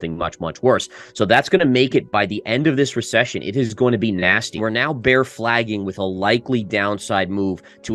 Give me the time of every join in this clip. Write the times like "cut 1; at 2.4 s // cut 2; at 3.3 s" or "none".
cut 1; at 1.0 s // cut 2; at 4.6 s